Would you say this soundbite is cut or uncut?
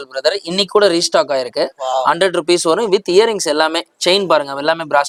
uncut